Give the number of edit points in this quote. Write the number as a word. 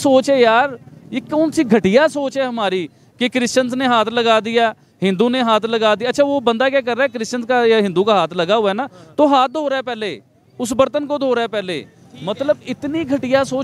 zero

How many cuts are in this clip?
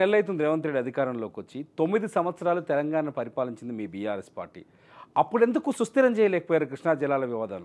zero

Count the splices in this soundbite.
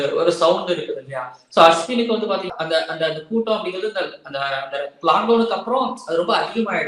zero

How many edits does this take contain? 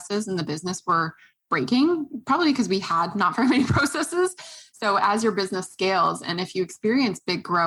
zero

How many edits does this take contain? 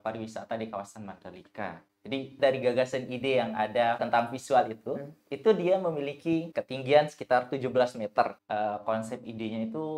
four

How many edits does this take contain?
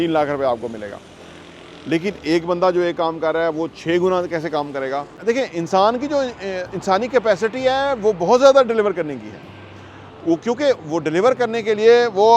one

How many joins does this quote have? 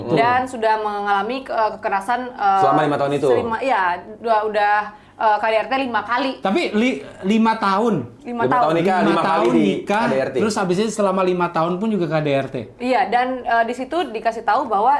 zero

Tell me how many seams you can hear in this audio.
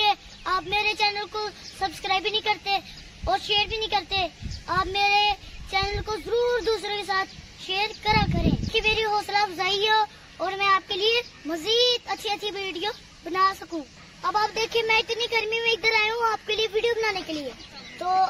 one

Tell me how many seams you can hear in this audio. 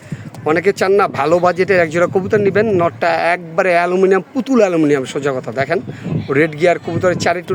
zero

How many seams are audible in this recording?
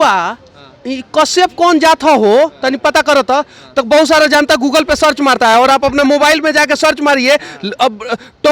zero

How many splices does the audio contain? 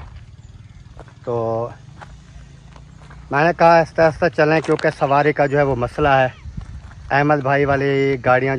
zero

